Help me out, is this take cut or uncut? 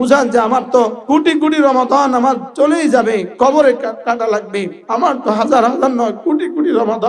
cut